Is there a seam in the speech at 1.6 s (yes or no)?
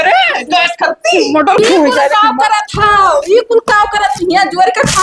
yes